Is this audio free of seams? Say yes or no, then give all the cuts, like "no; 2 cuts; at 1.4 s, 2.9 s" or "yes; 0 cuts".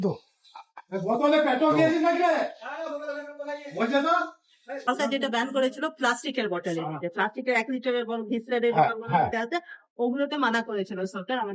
no; 1 cut; at 4.8 s